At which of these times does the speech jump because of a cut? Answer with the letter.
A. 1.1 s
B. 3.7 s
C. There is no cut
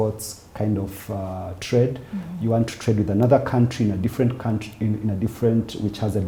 C